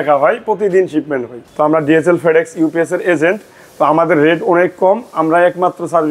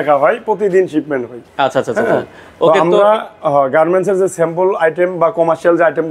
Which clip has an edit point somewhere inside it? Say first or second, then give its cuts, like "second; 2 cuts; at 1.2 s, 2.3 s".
first; 1 cut; at 1.4 s